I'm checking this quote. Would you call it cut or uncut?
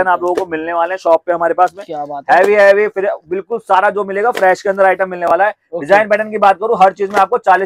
uncut